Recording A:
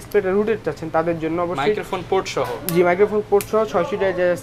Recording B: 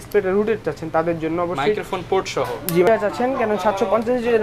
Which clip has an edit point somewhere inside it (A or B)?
B